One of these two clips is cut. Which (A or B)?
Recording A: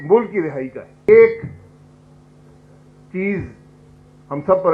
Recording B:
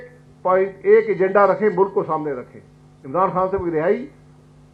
A